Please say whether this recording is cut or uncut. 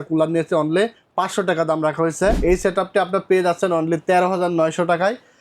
cut